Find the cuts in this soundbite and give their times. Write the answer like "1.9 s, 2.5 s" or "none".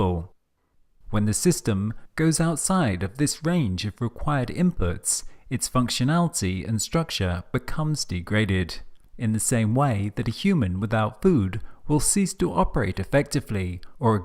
11.0 s